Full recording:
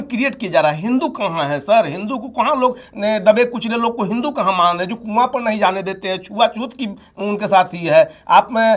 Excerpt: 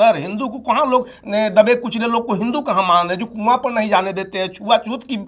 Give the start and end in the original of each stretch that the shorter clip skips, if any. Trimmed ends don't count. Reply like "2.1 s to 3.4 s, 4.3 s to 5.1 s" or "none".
none